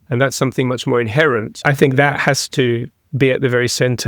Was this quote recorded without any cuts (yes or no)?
no